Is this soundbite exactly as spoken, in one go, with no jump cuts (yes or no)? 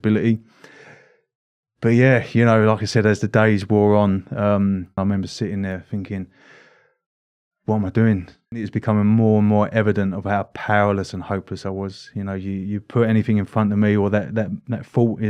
no